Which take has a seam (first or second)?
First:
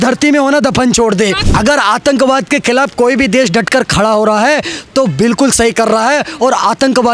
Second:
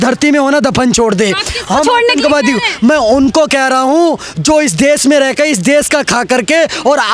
first